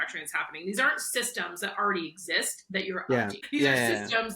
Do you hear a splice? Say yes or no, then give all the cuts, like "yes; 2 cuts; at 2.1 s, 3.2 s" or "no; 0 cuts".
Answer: yes; 1 cut; at 3.4 s